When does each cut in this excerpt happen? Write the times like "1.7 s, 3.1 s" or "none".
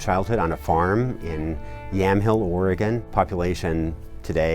3.1 s